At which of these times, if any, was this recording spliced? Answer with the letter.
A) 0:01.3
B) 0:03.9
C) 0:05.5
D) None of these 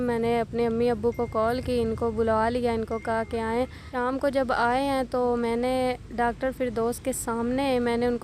B